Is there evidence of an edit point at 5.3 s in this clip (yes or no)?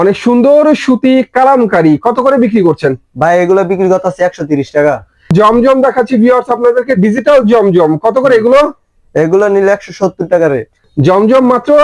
yes